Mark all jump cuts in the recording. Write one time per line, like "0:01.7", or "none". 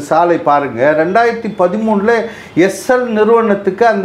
none